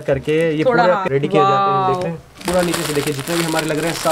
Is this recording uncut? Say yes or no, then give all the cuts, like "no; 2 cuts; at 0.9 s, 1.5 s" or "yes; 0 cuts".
no; 2 cuts; at 1.0 s, 2.4 s